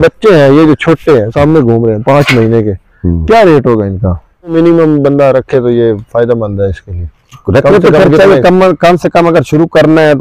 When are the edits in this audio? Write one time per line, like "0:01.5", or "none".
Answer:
0:04.5